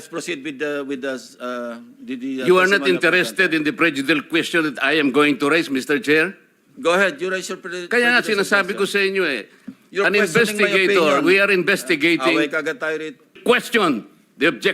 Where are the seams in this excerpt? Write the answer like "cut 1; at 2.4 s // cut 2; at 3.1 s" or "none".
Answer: cut 1; at 13.4 s